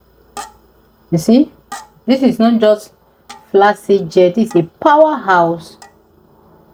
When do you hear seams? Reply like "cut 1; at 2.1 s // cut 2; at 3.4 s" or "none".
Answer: none